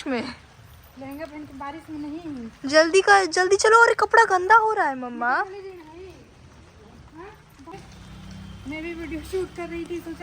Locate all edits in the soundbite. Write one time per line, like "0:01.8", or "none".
0:07.7